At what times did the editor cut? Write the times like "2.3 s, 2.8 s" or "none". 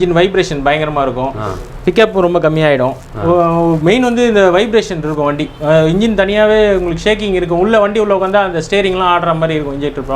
none